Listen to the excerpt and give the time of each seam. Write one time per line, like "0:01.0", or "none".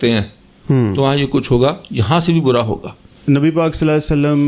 0:03.1